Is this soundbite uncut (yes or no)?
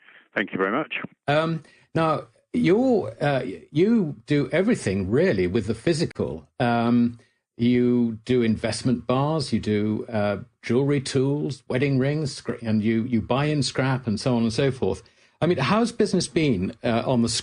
no